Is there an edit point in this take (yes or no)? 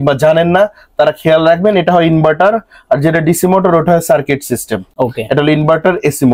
no